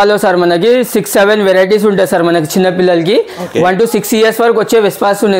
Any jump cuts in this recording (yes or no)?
no